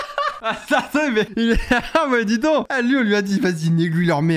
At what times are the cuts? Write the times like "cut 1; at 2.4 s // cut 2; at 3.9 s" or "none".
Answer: none